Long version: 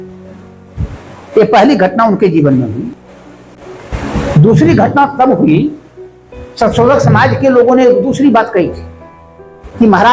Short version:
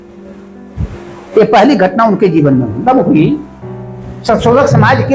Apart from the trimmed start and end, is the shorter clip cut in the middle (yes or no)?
yes